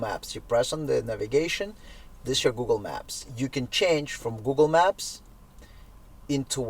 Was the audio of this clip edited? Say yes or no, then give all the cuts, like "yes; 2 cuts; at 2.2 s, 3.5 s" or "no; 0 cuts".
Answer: no; 0 cuts